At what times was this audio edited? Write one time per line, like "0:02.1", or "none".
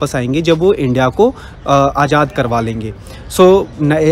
none